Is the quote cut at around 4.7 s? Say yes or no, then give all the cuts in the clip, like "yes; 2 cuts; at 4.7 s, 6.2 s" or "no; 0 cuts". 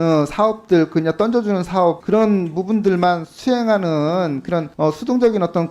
yes; 2 cuts; at 2.0 s, 4.7 s